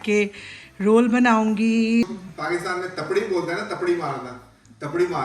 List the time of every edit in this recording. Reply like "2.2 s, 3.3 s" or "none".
2.1 s

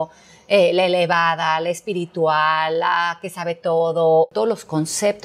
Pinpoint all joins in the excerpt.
4.3 s

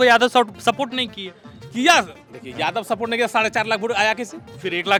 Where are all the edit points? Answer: none

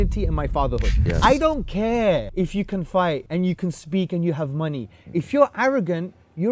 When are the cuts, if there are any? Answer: 1.0 s, 2.3 s, 3.2 s

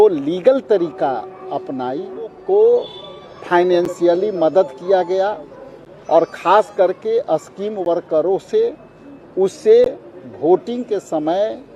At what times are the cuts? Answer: 2.4 s

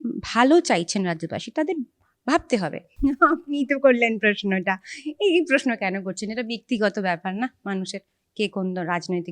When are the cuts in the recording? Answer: 2.8 s

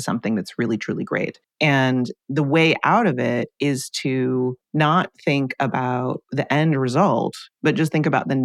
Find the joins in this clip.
1.4 s, 4.6 s, 6.2 s, 7.4 s

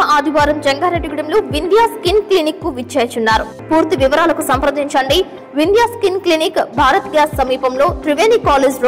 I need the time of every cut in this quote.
3.5 s

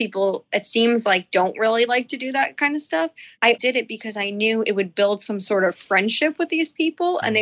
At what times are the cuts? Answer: 3.6 s

